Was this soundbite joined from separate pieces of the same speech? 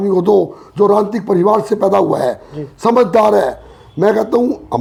no; 0 cuts

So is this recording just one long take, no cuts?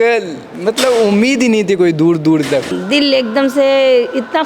no; 1 cut; at 2.7 s

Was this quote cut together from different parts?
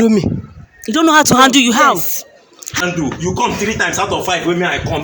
yes; 1 cut; at 2.8 s

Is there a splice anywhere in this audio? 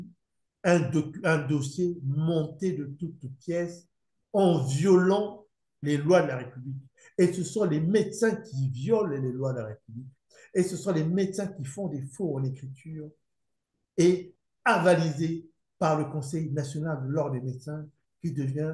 no; 0 cuts

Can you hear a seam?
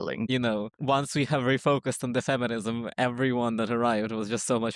no; 0 cuts

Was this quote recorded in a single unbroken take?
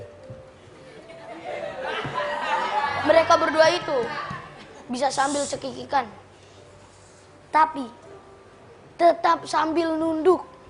yes; 0 cuts

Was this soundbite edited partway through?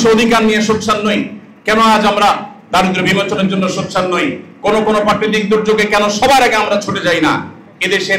no; 0 cuts

